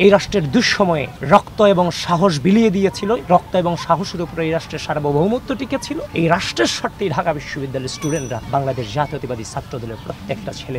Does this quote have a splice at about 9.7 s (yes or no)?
no